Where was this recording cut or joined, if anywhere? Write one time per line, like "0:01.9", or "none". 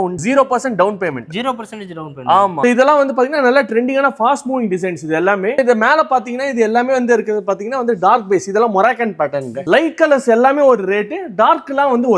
0:02.6
0:05.6
0:09.6